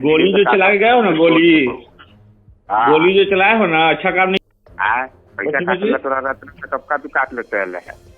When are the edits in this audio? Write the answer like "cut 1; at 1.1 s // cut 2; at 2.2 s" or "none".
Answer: cut 1; at 4.5 s